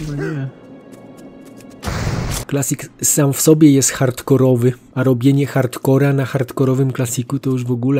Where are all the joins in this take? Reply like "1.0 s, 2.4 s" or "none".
2.4 s